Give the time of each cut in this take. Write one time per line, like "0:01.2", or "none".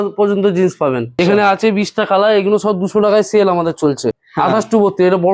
0:01.2
0:04.1